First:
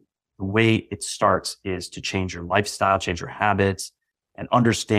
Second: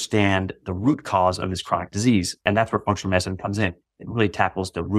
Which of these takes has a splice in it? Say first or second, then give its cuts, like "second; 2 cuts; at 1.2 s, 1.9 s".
second; 1 cut; at 2.4 s